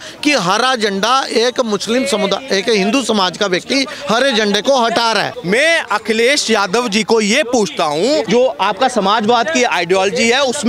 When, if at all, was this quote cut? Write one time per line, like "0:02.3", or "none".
0:05.4
0:08.3